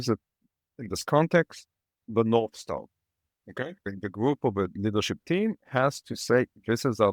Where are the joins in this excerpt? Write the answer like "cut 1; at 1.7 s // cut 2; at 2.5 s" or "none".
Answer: cut 1; at 3.9 s